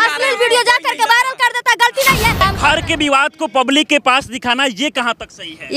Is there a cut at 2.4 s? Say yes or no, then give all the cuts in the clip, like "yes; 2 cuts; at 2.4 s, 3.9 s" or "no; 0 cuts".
yes; 1 cut; at 2.4 s